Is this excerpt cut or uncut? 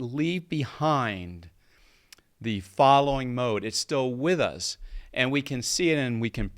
uncut